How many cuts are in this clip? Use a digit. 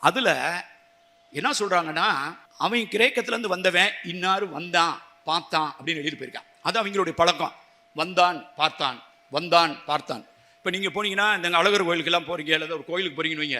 1